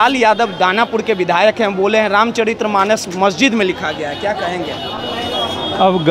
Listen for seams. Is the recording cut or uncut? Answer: uncut